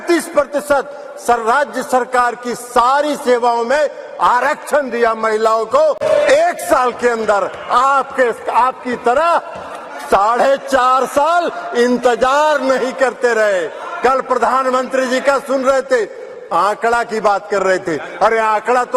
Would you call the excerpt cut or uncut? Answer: uncut